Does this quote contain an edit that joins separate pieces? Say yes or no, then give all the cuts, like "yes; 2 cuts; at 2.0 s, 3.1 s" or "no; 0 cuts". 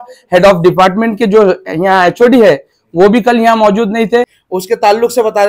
yes; 1 cut; at 4.4 s